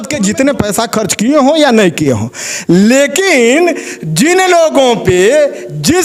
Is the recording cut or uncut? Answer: uncut